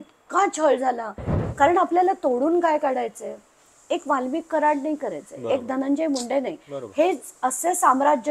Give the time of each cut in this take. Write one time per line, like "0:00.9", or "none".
0:01.3